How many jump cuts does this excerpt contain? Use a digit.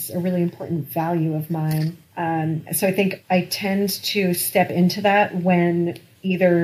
0